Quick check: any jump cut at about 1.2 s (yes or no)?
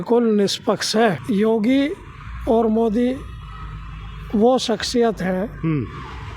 yes